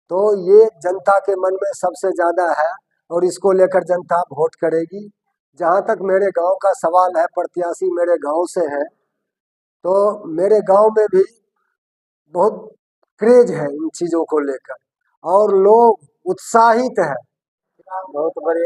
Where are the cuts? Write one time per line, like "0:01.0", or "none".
0:17.6